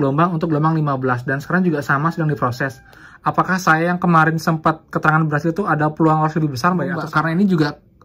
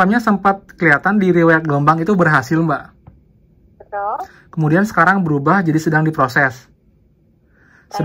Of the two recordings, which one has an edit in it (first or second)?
first